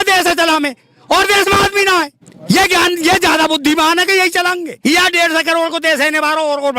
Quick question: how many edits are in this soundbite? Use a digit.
2